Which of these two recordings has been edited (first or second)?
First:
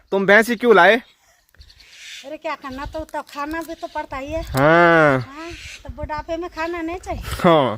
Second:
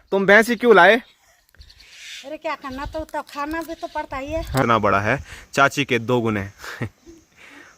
second